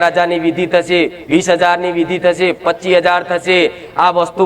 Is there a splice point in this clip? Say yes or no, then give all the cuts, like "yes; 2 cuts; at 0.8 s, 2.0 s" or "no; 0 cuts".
no; 0 cuts